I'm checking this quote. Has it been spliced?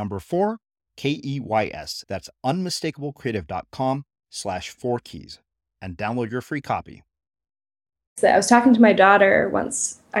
yes; 1 cut; at 8.2 s

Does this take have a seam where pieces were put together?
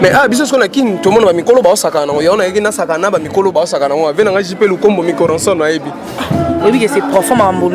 no; 0 cuts

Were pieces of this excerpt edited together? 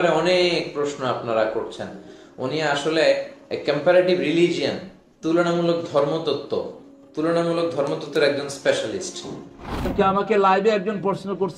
yes; 1 cut; at 9.9 s

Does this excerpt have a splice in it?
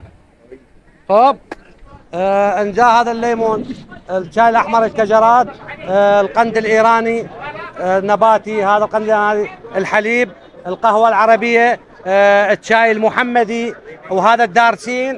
no; 0 cuts

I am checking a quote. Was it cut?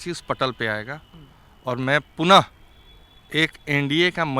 no; 0 cuts

